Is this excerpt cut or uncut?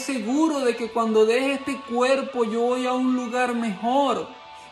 uncut